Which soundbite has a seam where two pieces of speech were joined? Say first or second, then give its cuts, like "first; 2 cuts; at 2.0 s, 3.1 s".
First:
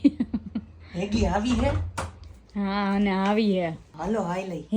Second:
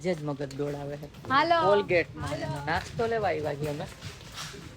second; 1 cut; at 1.1 s